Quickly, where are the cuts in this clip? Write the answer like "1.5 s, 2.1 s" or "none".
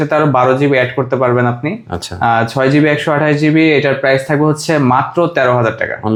none